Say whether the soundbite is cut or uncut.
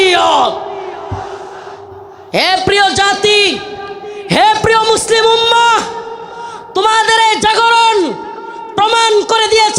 cut